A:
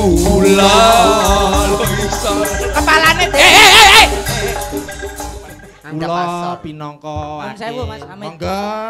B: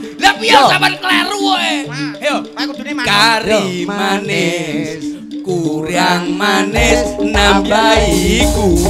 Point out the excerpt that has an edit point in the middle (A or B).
A